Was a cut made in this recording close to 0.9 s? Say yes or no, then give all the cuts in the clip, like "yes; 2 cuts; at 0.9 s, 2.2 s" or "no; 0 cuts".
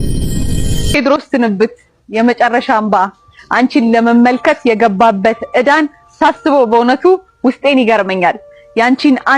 yes; 1 cut; at 0.9 s